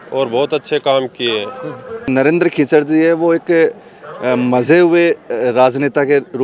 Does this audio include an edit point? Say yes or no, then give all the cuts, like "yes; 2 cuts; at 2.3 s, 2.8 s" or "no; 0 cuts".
yes; 1 cut; at 2.1 s